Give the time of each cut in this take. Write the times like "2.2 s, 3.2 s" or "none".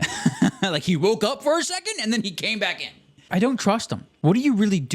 3.3 s, 4.0 s